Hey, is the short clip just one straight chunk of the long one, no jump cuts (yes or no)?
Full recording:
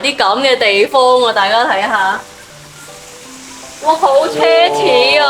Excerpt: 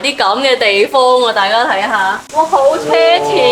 no